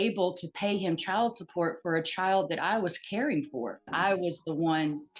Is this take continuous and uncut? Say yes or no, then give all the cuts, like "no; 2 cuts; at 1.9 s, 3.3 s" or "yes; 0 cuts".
no; 1 cut; at 3.9 s